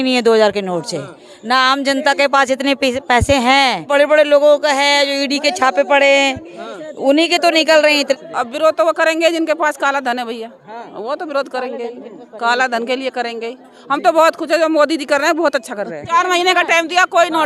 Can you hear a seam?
yes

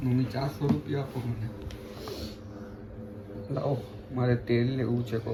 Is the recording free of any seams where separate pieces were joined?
yes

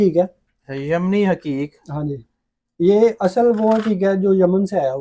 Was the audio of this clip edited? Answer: no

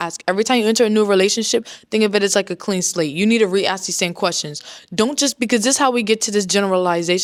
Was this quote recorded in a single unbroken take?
yes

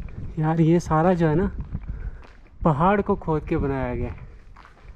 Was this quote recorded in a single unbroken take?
yes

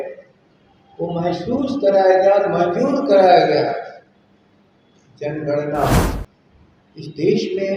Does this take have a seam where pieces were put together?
yes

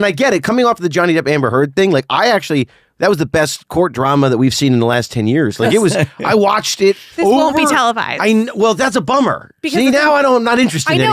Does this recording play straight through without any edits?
yes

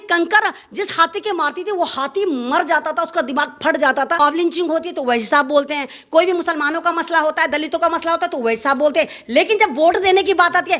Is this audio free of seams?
no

